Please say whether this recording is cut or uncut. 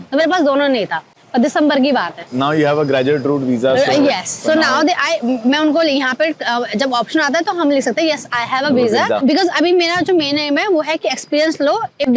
uncut